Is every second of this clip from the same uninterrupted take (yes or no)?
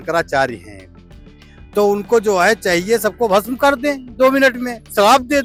yes